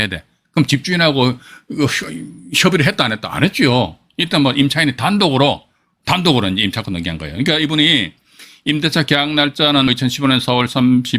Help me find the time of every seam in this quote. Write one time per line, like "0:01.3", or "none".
0:05.8
0:09.9